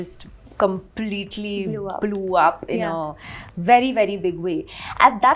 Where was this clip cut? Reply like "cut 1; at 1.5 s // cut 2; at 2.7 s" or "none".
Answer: none